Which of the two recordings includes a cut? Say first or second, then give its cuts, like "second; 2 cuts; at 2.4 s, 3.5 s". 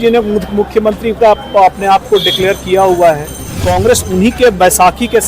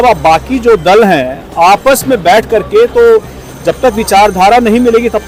first; 1 cut; at 3.7 s